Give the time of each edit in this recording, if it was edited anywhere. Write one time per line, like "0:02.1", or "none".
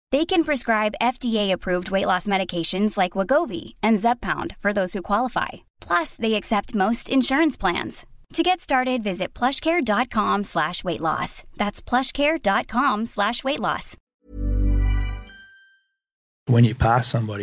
0:14.1
0:16.4